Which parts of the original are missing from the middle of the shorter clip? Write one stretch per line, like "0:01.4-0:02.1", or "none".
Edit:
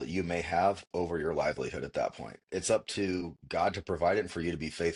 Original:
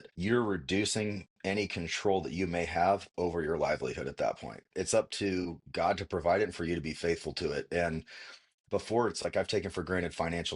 none